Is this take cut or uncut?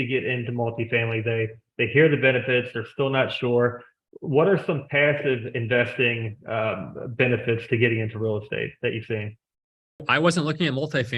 cut